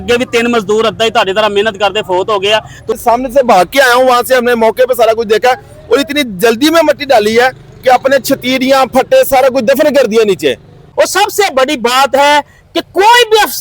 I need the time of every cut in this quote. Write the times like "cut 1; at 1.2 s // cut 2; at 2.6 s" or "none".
cut 1; at 3.0 s // cut 2; at 10.8 s